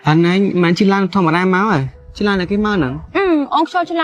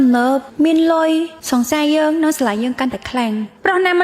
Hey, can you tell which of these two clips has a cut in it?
first; 1 cut; at 3.0 s

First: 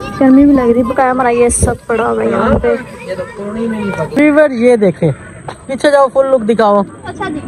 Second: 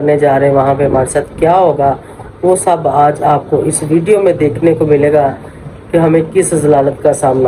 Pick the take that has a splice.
first; 1 cut; at 4.2 s

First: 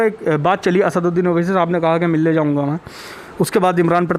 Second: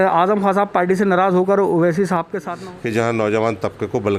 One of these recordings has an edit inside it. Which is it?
second; 1 cut; at 2.5 s

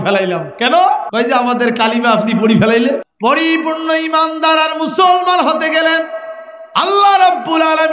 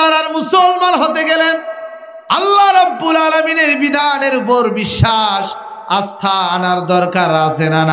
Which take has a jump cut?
first; 2 cuts; at 1.1 s, 3.1 s

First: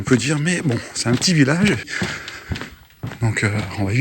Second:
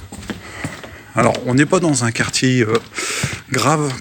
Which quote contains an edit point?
first; 1 cut; at 1.9 s

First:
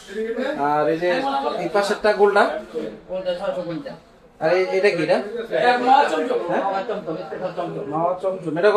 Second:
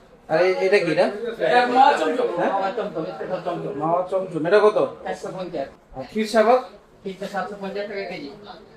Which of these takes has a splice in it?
second; 1 cut; at 5.8 s

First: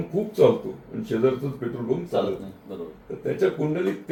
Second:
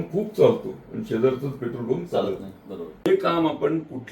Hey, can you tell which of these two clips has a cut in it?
second; 1 cut; at 2.9 s

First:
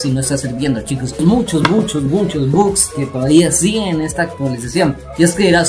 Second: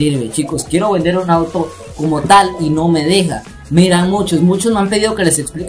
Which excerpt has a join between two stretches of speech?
first; 1 cut; at 1.2 s

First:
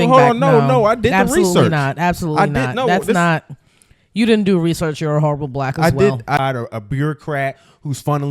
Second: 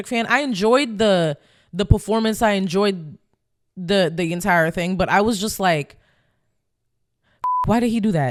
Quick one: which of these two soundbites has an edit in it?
first; 1 cut; at 6.4 s

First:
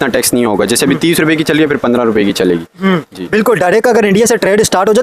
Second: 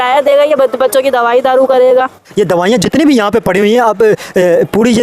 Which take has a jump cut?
second; 1 cut; at 2.2 s

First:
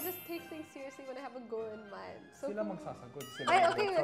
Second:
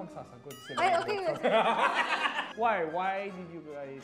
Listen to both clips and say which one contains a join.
second; 1 cut; at 2.4 s

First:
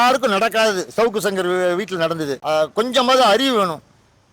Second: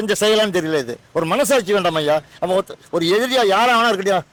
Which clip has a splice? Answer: first; 1 cut; at 2.3 s

